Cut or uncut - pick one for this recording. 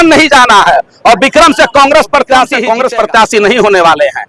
cut